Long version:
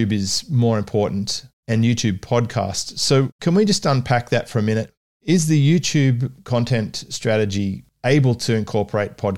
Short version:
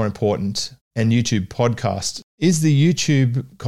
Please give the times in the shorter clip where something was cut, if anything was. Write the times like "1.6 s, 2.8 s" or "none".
2.2 s